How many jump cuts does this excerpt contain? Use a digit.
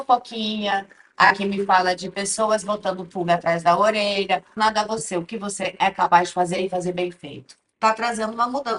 2